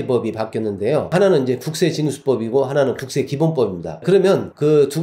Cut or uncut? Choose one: uncut